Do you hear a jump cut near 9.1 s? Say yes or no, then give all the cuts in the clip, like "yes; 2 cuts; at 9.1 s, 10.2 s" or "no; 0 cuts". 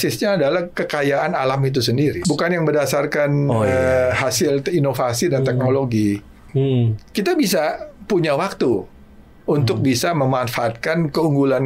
no; 2 cuts; at 2.2 s, 6.5 s